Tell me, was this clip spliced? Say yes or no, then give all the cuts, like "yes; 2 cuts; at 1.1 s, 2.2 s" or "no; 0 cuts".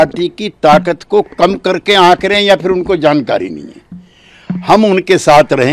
no; 0 cuts